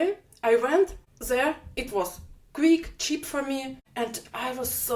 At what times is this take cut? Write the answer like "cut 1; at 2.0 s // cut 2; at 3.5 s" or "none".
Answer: cut 1; at 1.1 s // cut 2; at 3.8 s